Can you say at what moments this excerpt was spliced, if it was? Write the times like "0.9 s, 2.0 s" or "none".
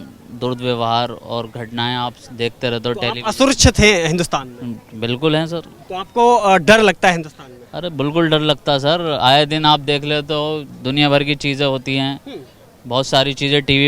none